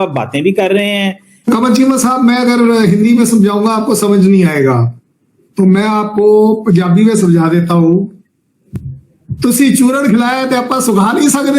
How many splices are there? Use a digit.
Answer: 1